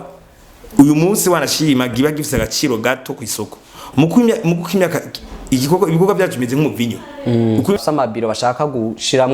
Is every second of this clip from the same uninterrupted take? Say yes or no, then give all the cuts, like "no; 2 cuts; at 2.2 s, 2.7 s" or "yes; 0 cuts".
no; 1 cut; at 7.8 s